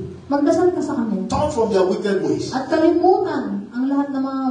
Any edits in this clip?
no; 0 cuts

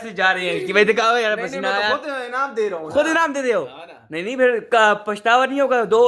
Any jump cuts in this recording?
no; 0 cuts

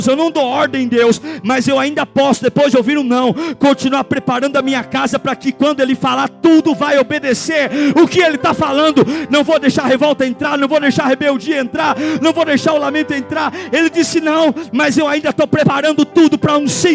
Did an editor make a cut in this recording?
no; 0 cuts

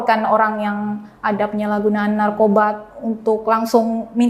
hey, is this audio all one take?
yes; 0 cuts

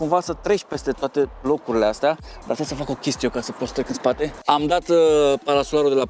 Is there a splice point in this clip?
no; 0 cuts

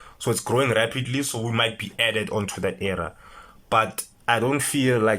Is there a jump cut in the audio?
yes; 1 cut; at 4.1 s

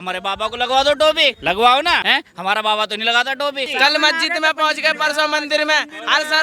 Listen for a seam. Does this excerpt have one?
yes; 3 cuts; at 1.4 s, 2.0 s, 3.7 s

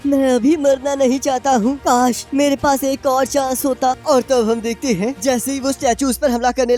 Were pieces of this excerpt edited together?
no; 0 cuts

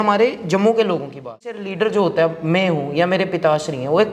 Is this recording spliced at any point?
yes; 1 cut; at 1.7 s

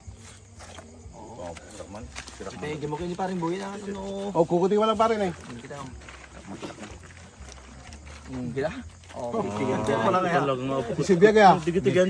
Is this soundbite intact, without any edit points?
yes; 0 cuts

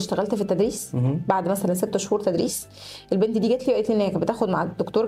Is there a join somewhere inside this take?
no; 0 cuts

